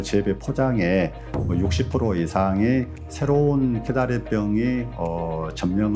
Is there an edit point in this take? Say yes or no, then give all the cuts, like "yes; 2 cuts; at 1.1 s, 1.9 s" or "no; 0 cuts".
no; 0 cuts